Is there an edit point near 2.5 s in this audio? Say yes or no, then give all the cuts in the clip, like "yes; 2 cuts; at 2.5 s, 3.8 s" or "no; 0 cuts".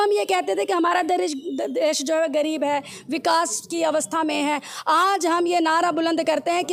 no; 0 cuts